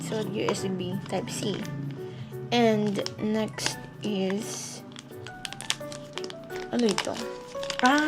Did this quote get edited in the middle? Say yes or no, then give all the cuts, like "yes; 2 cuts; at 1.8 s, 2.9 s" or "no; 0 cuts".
no; 0 cuts